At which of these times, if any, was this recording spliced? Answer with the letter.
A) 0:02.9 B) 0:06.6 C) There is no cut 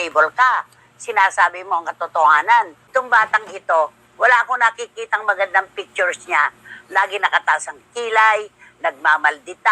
A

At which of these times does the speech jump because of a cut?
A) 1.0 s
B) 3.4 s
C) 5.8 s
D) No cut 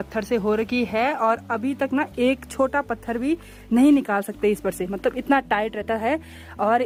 D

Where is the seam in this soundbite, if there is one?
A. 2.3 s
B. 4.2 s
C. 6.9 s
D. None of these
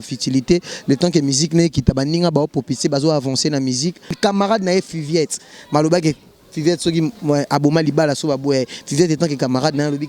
B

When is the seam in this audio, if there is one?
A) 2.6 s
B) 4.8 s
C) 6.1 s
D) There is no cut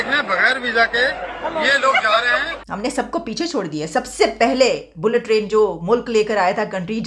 A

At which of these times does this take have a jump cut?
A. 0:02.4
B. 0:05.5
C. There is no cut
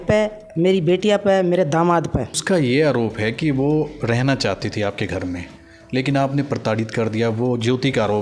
A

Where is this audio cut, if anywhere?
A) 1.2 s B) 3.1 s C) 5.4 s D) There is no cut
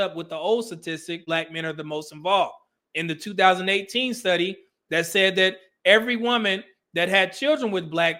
A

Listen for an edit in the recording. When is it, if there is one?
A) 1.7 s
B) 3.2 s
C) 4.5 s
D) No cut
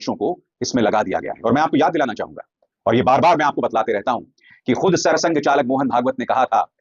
D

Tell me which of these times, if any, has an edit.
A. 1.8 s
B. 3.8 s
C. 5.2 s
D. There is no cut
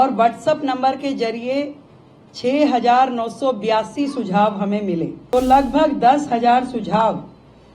C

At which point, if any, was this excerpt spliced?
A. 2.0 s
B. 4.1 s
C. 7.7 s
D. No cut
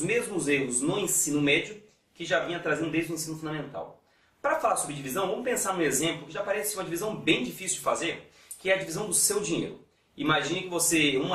D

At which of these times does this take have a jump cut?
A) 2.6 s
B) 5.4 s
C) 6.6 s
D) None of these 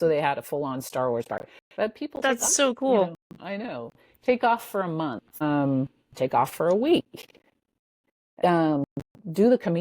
B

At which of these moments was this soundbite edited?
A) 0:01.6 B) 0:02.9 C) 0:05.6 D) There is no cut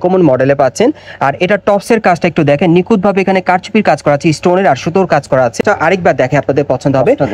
C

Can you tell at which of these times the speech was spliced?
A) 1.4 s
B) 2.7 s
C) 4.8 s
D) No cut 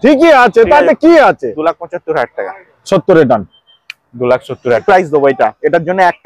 C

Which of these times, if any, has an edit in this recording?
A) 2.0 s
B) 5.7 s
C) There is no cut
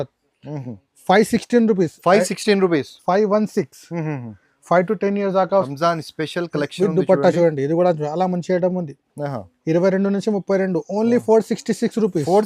B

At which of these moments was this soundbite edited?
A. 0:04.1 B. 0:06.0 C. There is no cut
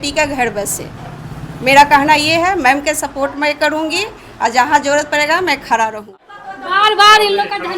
B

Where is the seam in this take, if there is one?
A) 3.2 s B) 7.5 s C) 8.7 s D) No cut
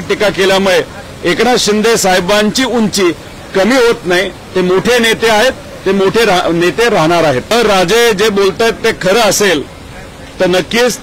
B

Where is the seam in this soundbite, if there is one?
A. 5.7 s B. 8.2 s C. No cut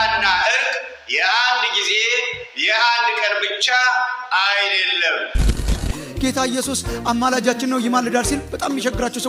A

